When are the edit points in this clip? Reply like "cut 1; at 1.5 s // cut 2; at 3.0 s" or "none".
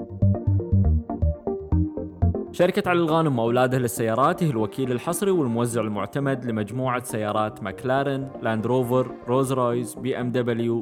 cut 1; at 2.5 s